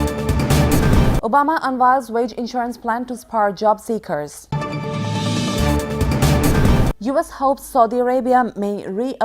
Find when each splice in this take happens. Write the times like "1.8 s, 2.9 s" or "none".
none